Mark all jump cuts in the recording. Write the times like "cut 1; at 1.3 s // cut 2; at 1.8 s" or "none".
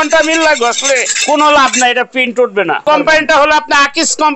cut 1; at 1.1 s // cut 2; at 2.8 s